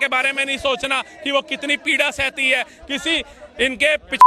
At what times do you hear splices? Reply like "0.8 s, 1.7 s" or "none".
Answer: none